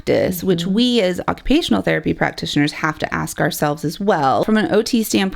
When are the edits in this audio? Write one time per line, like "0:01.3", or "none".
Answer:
0:04.4